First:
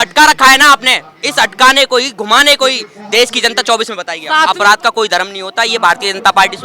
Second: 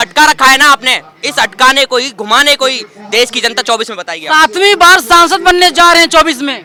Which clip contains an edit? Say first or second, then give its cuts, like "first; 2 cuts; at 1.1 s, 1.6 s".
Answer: first; 1 cut; at 4.5 s